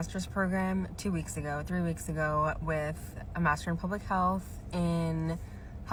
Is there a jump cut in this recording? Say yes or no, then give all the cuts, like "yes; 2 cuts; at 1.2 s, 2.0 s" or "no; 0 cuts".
no; 0 cuts